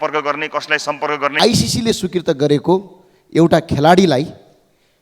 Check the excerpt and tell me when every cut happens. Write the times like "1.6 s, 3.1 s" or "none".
1.3 s